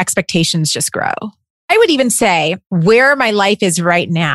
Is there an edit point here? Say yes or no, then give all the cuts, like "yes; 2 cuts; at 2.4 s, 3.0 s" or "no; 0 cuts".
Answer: yes; 1 cut; at 2.6 s